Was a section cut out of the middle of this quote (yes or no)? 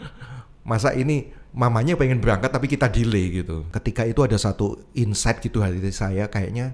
yes